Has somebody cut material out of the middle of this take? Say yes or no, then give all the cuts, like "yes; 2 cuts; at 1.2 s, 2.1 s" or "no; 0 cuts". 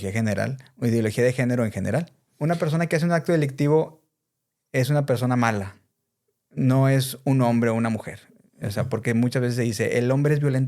yes; 1 cut; at 2.2 s